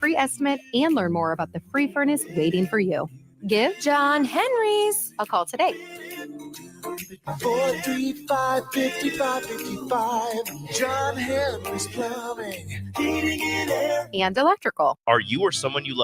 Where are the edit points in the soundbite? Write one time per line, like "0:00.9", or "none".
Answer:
0:15.0